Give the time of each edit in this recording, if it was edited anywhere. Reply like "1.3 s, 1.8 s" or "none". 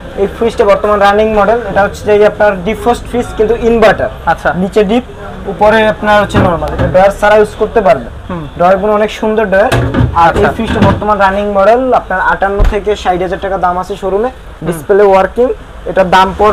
none